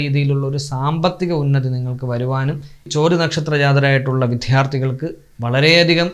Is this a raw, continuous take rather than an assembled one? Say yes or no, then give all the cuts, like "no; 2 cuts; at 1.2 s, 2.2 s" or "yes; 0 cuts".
no; 1 cut; at 2.9 s